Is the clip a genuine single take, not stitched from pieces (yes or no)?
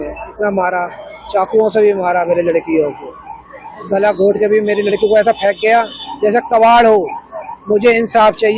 yes